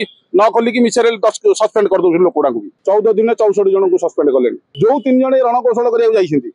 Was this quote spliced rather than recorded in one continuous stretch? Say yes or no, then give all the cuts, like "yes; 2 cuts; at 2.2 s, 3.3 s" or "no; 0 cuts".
yes; 2 cuts; at 2.7 s, 4.6 s